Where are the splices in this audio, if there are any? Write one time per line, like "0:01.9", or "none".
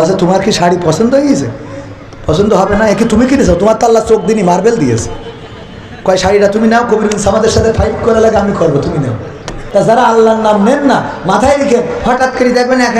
0:09.6